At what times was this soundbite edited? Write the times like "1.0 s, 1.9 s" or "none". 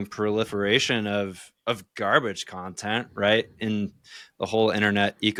none